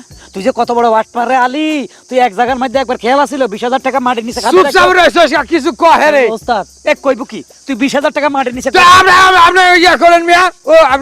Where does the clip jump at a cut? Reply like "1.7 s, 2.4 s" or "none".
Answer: none